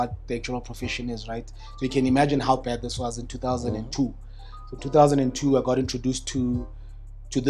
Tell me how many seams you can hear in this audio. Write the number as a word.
zero